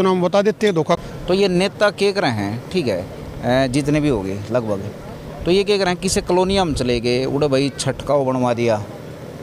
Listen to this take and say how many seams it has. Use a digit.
1